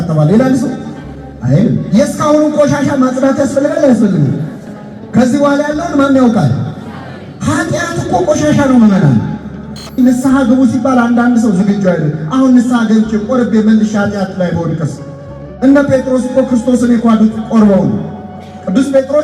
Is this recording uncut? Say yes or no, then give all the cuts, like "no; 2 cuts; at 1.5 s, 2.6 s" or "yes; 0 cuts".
no; 1 cut; at 10.0 s